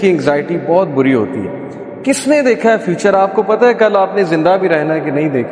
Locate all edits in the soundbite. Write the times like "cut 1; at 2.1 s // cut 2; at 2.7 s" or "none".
none